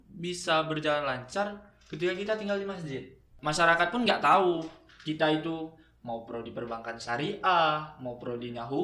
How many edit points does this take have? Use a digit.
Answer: 1